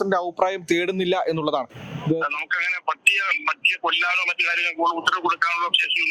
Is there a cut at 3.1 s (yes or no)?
no